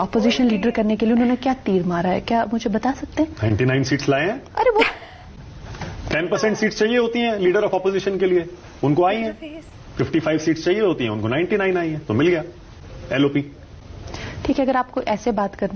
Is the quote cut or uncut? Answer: cut